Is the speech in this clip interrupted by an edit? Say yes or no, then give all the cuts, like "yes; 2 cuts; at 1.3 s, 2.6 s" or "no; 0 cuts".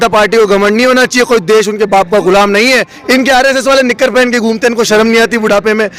yes; 1 cut; at 2.9 s